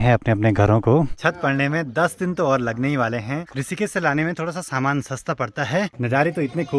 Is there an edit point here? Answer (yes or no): yes